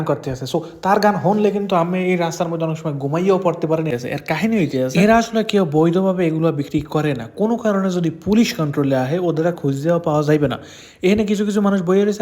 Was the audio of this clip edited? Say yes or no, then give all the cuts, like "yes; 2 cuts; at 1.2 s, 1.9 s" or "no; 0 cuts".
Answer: yes; 1 cut; at 3.9 s